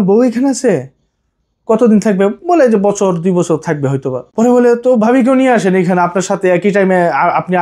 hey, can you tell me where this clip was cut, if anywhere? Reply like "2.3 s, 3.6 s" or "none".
4.2 s